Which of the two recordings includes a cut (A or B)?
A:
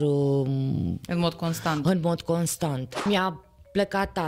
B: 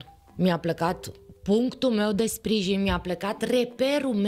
A